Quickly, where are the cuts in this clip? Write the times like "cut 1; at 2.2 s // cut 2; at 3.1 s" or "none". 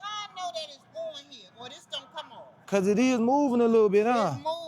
cut 1; at 2.6 s